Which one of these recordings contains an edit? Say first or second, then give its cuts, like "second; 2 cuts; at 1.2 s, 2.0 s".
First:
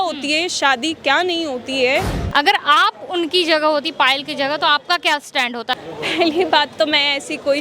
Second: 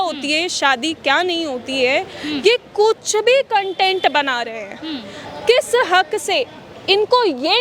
first; 2 cuts; at 2.2 s, 5.7 s